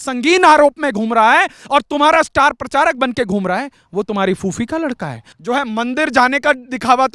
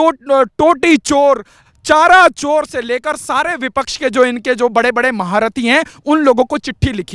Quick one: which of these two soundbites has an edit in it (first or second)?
first